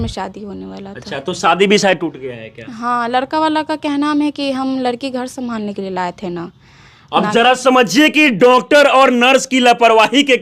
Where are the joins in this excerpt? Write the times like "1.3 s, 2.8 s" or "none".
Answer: none